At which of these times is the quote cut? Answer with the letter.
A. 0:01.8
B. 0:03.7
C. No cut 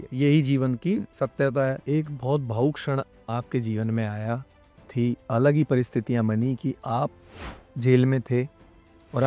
A